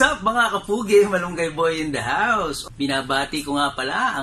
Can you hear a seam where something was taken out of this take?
yes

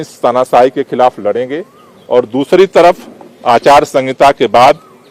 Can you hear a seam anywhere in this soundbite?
no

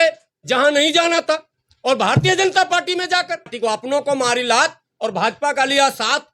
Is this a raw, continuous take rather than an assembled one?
no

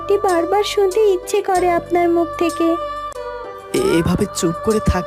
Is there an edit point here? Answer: no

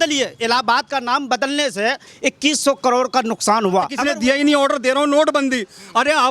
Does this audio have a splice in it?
yes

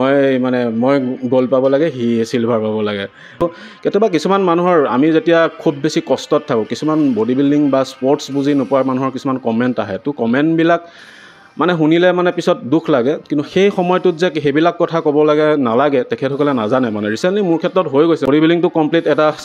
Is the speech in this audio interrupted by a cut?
yes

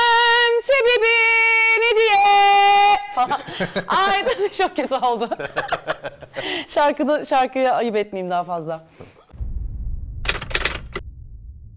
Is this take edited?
no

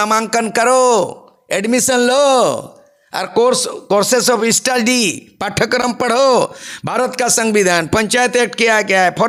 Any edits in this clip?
no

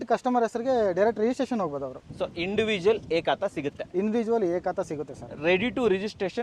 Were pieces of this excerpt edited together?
no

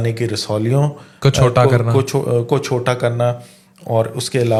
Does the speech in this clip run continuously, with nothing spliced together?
yes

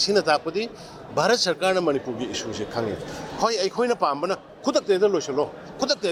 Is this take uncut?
yes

